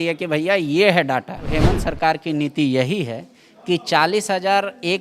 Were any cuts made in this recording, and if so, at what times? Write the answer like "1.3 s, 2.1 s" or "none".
1.5 s